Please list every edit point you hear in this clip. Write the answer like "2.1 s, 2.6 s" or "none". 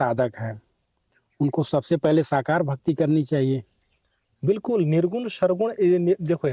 none